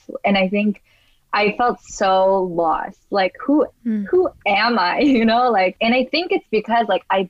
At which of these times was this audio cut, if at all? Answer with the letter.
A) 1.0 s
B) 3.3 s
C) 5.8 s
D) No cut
C